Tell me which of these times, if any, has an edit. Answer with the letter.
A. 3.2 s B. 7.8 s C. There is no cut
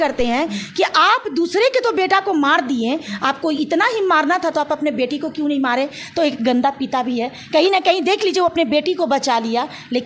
C